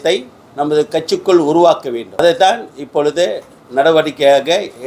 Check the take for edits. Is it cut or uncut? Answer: cut